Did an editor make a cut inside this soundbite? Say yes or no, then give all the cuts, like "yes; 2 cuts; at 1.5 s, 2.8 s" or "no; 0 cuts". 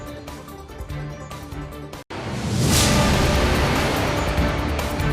yes; 1 cut; at 1.3 s